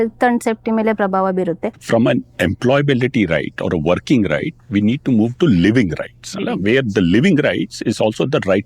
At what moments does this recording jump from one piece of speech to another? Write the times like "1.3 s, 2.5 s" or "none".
1.7 s